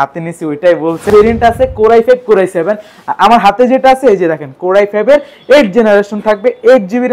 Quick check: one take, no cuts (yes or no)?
no